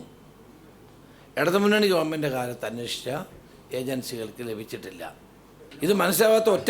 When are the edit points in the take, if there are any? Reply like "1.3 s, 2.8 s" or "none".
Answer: 5.7 s